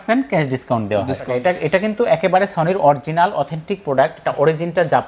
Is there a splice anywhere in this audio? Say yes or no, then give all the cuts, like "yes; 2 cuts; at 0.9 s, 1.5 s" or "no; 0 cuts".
yes; 1 cut; at 1.3 s